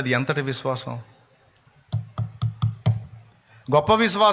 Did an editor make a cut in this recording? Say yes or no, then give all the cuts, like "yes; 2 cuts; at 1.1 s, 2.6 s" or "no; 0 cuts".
no; 0 cuts